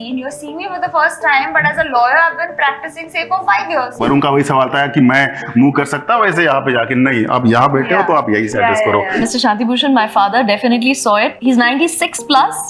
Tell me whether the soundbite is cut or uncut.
cut